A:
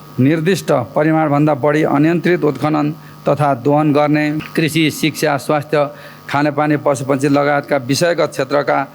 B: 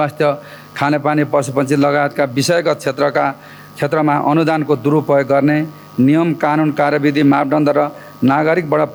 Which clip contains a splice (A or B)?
A